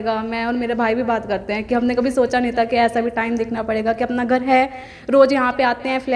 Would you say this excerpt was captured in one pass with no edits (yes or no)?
yes